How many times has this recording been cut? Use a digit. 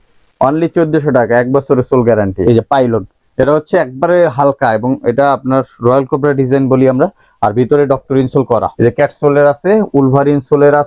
2